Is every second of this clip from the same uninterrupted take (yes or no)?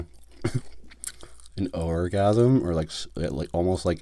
yes